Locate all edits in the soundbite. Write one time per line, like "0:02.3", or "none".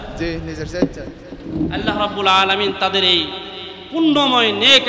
none